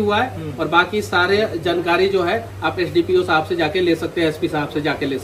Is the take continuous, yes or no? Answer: yes